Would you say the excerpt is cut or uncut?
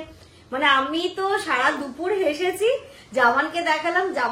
uncut